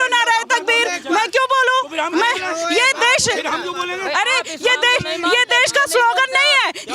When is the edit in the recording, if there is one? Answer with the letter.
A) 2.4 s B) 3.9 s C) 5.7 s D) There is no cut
D